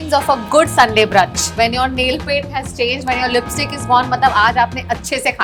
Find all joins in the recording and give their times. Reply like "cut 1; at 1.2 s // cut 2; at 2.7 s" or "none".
none